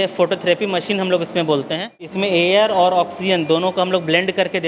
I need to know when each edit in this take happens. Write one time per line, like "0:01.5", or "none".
0:02.1

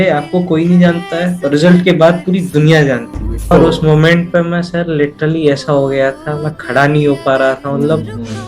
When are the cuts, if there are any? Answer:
0:03.5

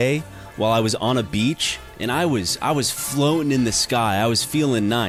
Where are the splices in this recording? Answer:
none

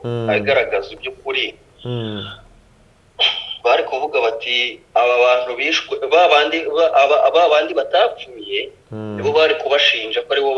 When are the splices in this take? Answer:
none

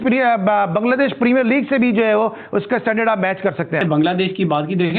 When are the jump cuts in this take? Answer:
0:03.8

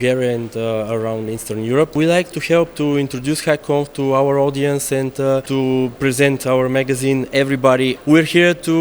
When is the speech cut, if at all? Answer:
0:01.9
0:05.5
0:08.0

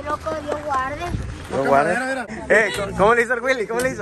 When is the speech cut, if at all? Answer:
0:02.3

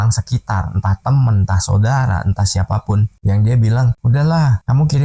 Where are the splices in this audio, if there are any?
none

